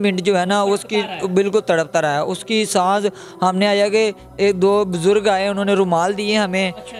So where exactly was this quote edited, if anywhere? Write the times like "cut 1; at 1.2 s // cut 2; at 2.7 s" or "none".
none